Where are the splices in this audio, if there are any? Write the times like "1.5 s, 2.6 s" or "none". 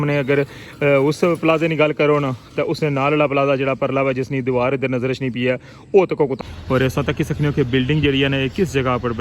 6.3 s